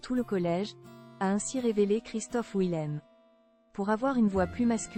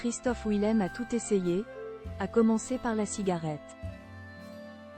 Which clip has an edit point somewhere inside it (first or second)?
second